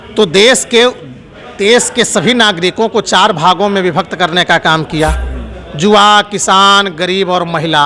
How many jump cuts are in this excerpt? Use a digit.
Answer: 0